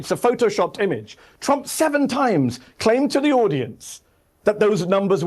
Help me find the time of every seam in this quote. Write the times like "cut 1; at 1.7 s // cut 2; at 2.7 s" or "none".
none